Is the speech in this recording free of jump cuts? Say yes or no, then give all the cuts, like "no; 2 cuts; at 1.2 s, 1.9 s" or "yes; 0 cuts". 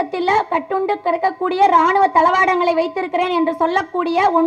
yes; 0 cuts